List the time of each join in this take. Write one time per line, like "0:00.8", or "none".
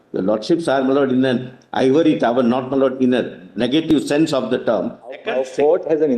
0:05.2